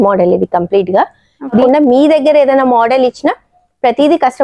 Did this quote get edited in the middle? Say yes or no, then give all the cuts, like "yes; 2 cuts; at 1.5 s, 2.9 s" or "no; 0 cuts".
yes; 1 cut; at 1.6 s